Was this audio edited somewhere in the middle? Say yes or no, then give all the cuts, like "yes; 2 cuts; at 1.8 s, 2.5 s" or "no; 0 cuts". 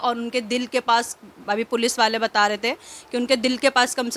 no; 0 cuts